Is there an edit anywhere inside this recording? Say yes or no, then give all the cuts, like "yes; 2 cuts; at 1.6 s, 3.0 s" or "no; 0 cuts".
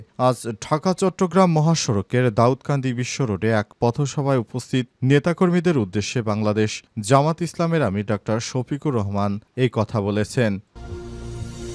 yes; 1 cut; at 10.8 s